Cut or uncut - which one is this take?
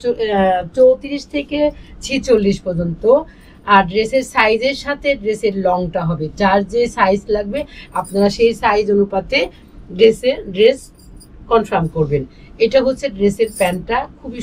uncut